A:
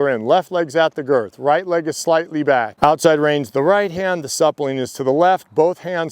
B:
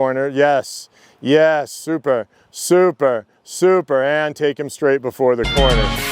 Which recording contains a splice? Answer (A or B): A